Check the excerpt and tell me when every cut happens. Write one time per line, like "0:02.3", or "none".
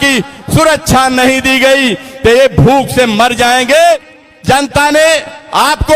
0:04.0